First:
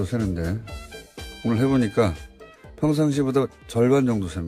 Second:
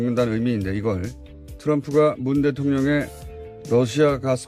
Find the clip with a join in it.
first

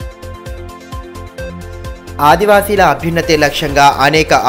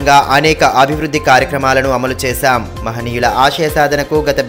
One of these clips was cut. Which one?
first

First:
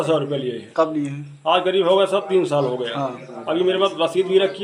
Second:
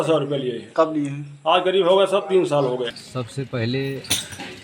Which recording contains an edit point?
second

